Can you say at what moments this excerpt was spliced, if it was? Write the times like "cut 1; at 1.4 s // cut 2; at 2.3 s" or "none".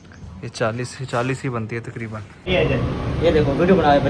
cut 1; at 2.5 s